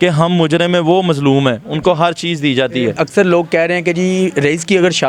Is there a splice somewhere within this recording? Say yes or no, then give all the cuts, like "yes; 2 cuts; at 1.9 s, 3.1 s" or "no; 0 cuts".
yes; 1 cut; at 3.0 s